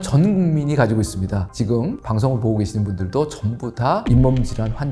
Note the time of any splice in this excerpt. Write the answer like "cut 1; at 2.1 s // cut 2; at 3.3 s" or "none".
none

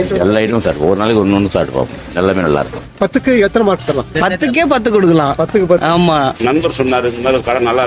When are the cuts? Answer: cut 1; at 2.8 s // cut 2; at 6.3 s

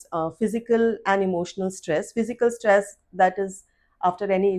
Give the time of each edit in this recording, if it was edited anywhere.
none

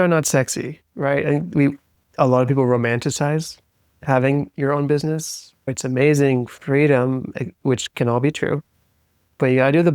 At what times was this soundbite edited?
none

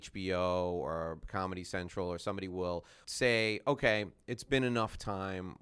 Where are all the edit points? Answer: cut 1; at 2.9 s

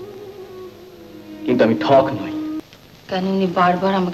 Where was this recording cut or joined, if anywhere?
cut 1; at 2.6 s

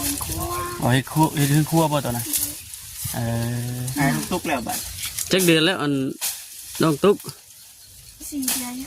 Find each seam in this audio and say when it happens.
cut 1; at 3.8 s

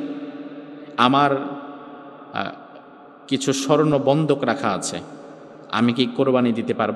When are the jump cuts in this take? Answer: none

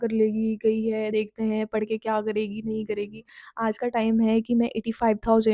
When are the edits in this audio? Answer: none

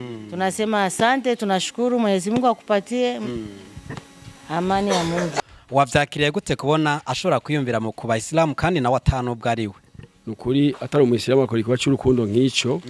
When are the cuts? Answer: cut 1; at 5.3 s

